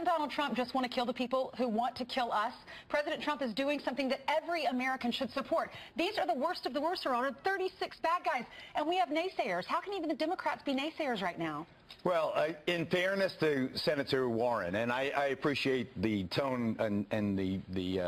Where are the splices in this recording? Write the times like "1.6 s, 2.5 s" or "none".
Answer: none